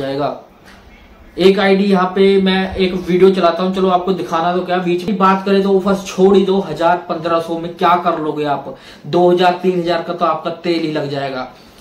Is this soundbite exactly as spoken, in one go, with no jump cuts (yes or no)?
no